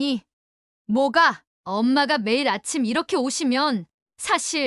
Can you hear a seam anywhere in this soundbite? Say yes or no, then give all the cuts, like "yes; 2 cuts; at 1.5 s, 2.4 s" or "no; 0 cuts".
yes; 1 cut; at 1.5 s